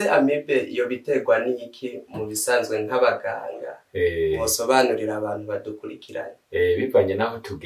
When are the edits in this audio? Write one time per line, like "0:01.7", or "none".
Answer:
none